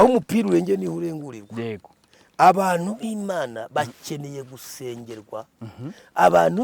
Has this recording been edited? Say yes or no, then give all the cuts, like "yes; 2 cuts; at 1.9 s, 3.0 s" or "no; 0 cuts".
no; 0 cuts